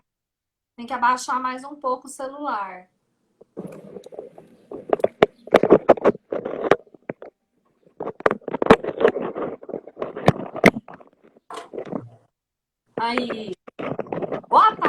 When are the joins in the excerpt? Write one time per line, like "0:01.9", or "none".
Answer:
0:08.9